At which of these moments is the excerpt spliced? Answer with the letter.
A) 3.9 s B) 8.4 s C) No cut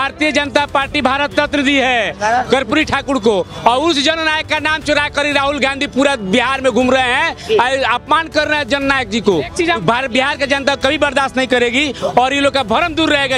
C